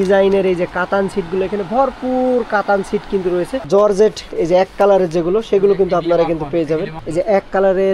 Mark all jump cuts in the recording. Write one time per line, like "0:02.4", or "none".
0:03.7
0:07.0